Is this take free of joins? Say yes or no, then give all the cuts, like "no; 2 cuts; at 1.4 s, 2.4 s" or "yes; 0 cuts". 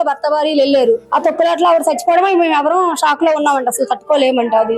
no; 1 cut; at 1.0 s